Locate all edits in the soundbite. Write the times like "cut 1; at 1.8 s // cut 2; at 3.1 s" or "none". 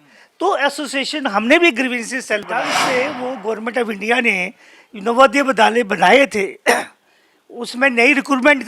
cut 1; at 2.8 s

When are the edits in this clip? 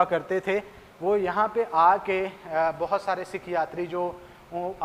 none

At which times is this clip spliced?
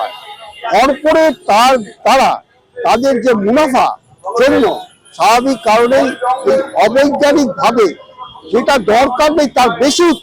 none

